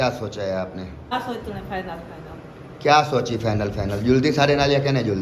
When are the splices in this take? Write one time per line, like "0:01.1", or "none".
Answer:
0:01.1

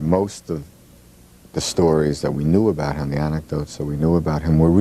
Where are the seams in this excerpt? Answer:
0:02.8

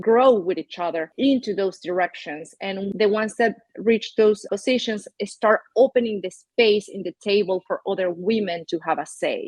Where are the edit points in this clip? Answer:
0:01.1
0:02.9
0:04.5

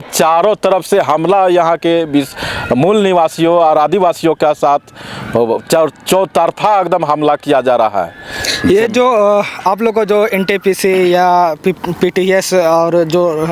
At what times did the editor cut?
none

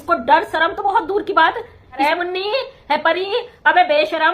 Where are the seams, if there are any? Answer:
0:02.0

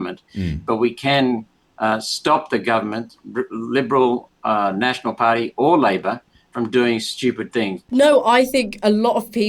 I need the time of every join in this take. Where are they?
0:07.8

